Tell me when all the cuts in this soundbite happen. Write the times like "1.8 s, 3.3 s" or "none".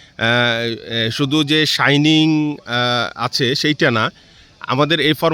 none